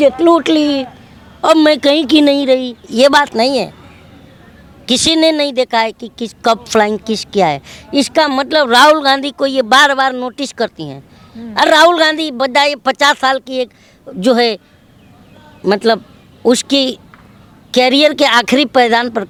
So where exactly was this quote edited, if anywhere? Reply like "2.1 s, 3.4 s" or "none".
none